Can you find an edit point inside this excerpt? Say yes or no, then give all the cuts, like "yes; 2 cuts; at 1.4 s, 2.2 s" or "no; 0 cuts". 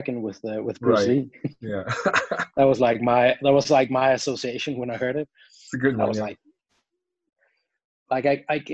no; 0 cuts